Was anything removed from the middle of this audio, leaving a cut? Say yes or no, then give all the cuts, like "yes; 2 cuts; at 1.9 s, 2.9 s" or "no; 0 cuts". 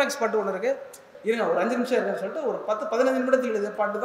yes; 1 cut; at 1.1 s